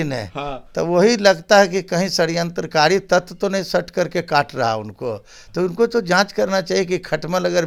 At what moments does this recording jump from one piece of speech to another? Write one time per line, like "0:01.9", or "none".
none